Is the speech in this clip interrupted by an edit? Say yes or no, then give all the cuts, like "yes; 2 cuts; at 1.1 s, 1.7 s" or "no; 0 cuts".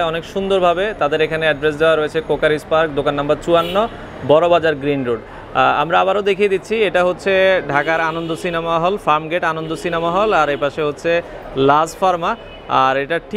no; 0 cuts